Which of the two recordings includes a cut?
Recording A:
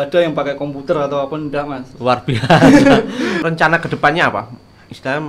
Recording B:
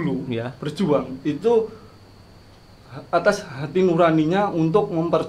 A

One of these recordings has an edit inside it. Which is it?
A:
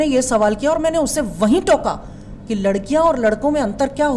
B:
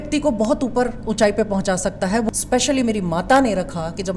B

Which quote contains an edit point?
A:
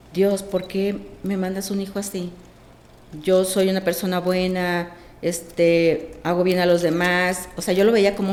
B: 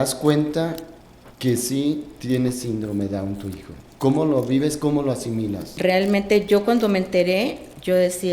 B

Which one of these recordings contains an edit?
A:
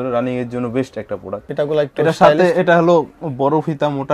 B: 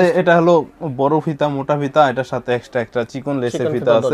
A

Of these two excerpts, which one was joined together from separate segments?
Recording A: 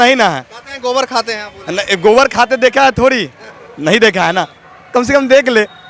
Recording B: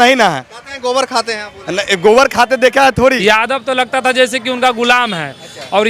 B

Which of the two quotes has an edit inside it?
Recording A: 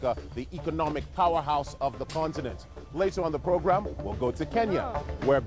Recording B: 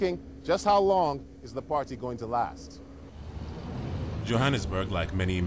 B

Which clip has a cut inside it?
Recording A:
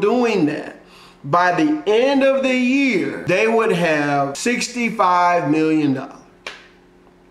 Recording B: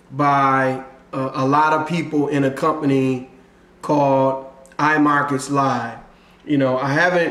A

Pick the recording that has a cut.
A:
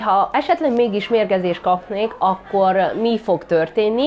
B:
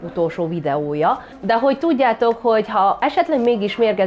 B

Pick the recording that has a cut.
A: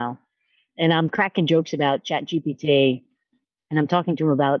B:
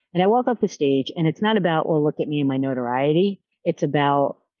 B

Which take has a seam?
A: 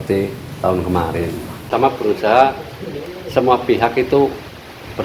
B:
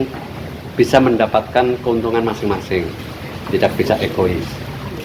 A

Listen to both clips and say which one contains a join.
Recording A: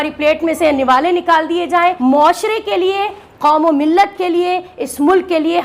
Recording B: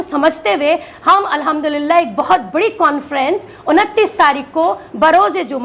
A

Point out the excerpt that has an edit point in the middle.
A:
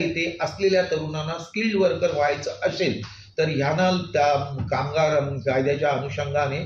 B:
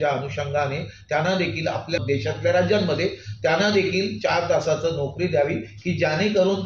B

